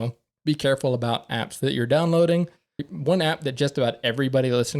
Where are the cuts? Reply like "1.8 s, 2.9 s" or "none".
2.9 s